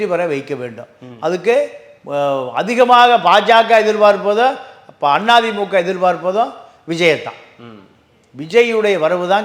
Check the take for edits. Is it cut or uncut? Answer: uncut